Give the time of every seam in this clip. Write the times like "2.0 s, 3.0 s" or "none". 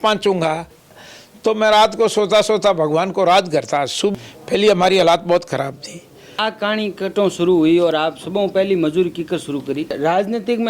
0.9 s, 4.1 s, 6.2 s, 9.9 s